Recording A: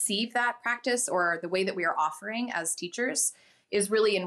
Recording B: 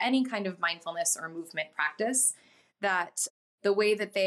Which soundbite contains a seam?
B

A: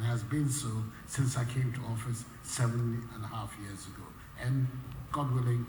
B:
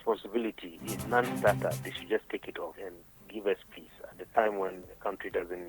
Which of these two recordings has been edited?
B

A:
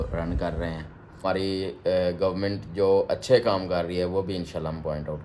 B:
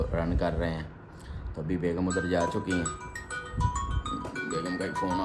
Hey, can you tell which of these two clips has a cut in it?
A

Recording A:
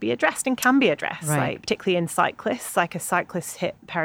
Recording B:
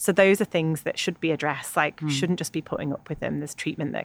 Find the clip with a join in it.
A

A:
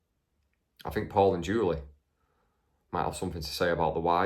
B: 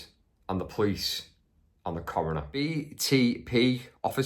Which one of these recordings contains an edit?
B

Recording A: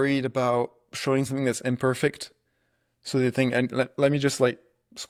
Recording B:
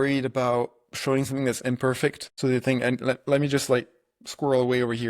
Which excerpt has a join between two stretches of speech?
B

